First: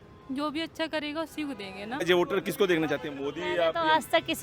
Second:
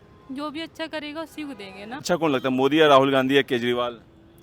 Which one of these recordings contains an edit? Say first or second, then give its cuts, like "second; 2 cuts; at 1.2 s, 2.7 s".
second; 1 cut; at 2.0 s